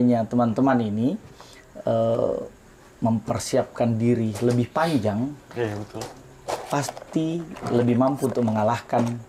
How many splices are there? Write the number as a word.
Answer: zero